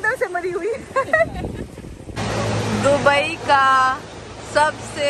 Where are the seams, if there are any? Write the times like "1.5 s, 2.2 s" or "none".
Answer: 2.2 s